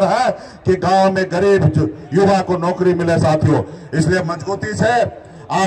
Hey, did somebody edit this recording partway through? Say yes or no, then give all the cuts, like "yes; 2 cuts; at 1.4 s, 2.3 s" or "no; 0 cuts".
no; 0 cuts